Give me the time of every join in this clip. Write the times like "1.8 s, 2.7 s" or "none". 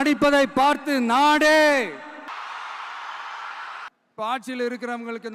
2.3 s, 3.9 s